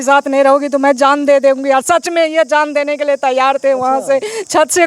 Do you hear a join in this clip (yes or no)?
no